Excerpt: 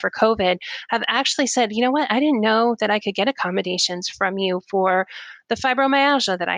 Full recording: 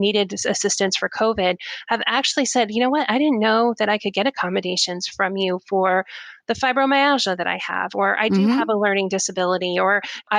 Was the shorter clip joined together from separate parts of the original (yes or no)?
no